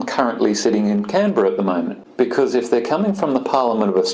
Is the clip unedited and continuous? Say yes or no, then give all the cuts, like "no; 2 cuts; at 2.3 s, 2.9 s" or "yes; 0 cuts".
no; 1 cut; at 2.0 s